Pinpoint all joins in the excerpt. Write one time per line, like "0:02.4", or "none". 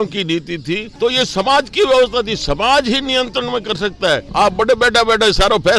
0:00.9
0:04.3